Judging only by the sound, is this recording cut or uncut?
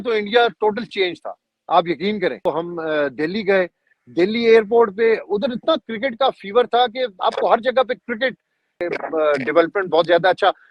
cut